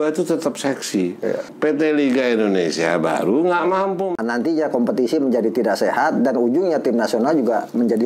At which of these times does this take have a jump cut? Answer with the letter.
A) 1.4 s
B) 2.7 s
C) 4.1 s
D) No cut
C